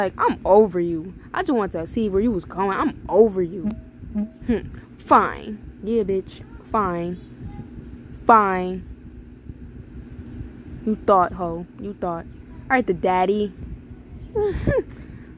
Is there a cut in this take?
no; 0 cuts

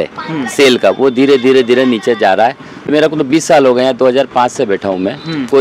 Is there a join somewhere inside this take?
yes; 1 cut; at 2.9 s

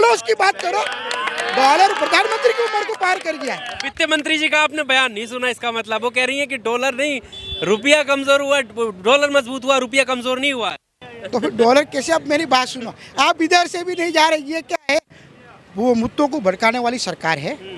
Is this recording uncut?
yes; 0 cuts

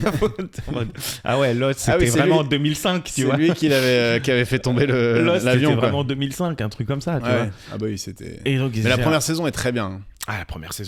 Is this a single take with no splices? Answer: yes; 0 cuts

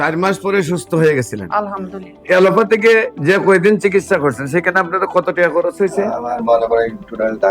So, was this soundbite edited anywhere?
yes; 1 cut; at 2.2 s

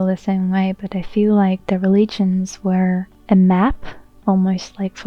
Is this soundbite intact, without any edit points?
no; 1 cut; at 3.1 s

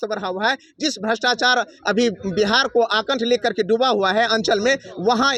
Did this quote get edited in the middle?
no; 0 cuts

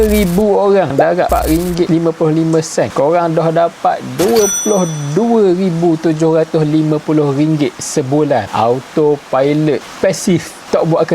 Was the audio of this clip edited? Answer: no; 0 cuts

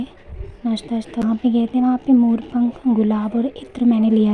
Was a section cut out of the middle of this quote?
yes; 1 cut; at 1.2 s

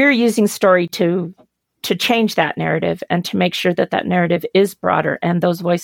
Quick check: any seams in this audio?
no; 0 cuts

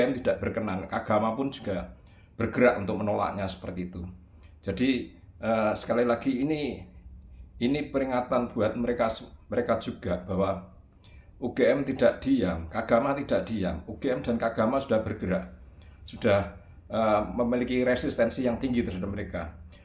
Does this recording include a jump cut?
no; 0 cuts

